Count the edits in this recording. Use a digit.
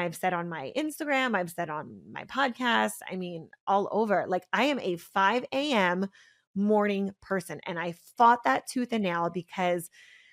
1